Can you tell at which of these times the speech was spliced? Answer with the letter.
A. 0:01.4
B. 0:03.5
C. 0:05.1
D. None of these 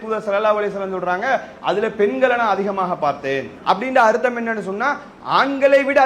B